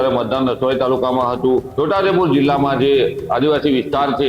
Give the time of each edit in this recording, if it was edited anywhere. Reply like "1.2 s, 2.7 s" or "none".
1.7 s